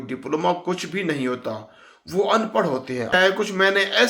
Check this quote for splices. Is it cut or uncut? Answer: cut